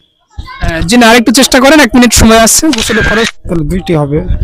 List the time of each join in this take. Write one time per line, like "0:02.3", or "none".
0:03.4